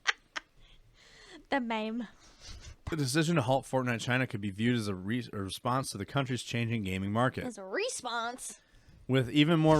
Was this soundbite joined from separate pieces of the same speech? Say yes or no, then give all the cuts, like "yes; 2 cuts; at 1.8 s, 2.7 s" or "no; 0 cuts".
yes; 1 cut; at 2.8 s